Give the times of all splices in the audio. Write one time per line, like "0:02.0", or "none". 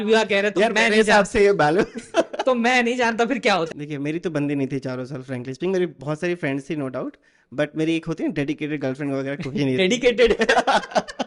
0:03.7